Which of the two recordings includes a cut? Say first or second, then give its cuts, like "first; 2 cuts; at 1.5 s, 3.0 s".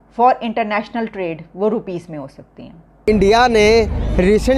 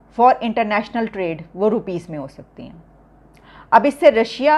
first; 1 cut; at 3.0 s